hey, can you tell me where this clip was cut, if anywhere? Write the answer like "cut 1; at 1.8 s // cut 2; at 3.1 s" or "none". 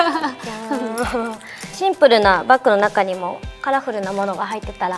cut 1; at 1.7 s